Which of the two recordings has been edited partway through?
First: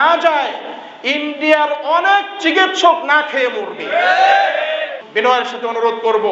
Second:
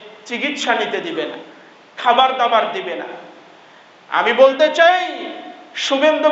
first; 1 cut; at 5.0 s

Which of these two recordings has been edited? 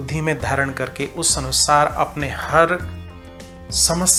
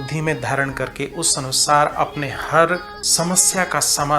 second; 1 cut; at 3.0 s

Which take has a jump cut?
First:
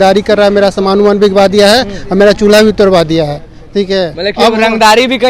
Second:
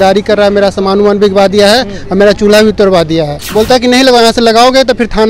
second; 1 cut; at 3.4 s

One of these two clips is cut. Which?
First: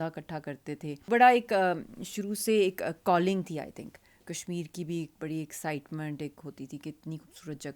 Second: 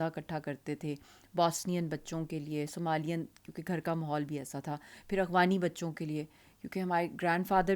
first; 1 cut; at 1.0 s

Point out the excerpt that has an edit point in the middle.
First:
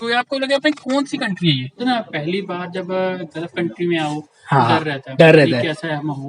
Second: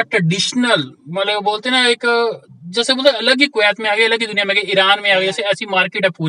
first; 1 cut; at 1.8 s

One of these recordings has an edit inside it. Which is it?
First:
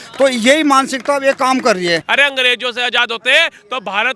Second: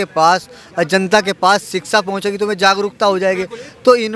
first; 1 cut; at 2.1 s

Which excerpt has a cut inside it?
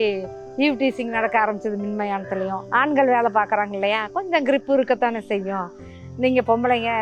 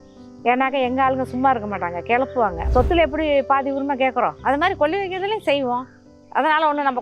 second; 1 cut; at 2.6 s

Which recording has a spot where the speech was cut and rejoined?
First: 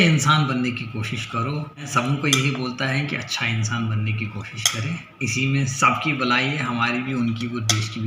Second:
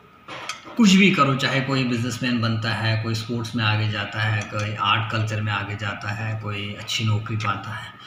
first; 1 cut; at 1.9 s

